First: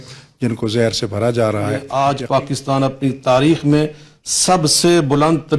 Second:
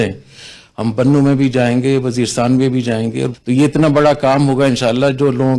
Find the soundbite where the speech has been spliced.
first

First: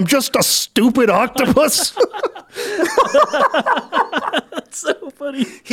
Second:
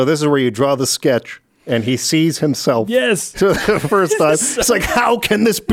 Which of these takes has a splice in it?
first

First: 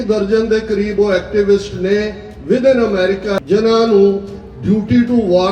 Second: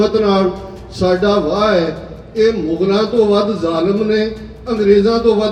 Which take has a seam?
first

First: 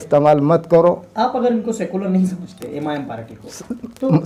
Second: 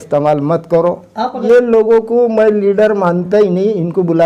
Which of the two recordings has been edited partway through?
second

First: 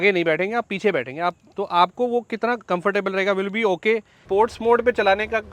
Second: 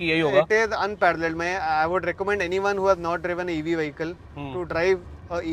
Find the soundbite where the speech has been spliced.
first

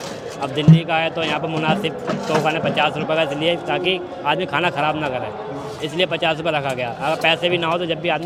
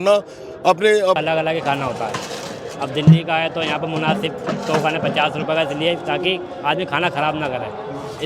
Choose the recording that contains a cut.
second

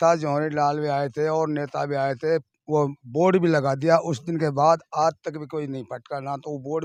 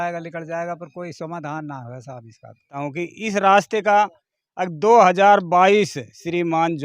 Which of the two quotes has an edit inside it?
second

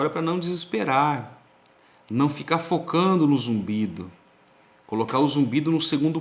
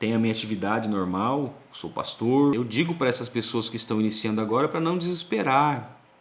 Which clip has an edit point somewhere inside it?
second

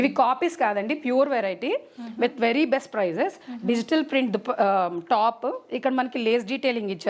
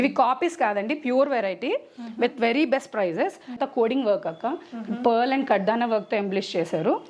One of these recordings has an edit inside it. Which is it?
second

